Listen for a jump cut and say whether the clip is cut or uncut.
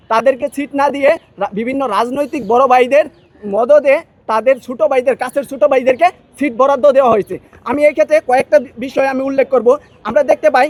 uncut